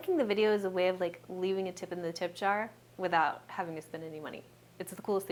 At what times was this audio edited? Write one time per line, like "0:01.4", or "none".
none